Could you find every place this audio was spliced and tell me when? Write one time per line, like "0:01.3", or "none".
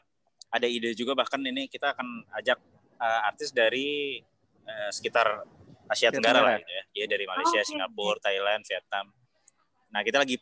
none